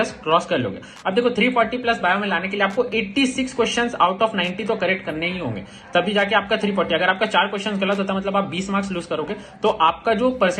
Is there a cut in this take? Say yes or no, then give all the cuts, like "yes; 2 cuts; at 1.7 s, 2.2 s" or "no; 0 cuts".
no; 0 cuts